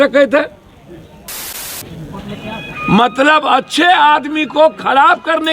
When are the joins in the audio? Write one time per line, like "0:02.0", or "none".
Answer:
0:01.6